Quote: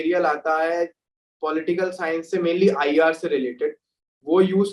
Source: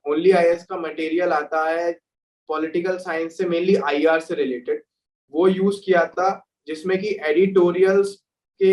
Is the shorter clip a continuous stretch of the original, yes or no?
yes